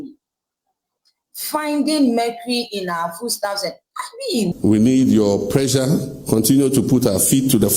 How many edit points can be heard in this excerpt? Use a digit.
1